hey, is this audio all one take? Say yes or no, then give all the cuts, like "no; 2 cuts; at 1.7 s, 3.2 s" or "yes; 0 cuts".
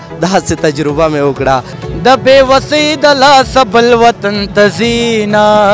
no; 1 cut; at 1.7 s